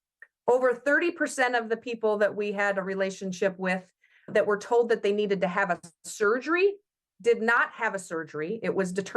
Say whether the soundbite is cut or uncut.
cut